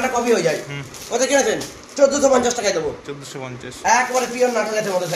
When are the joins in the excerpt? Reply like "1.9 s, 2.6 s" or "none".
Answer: none